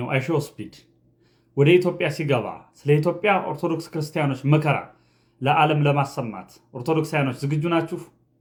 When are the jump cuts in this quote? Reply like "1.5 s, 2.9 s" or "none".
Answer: none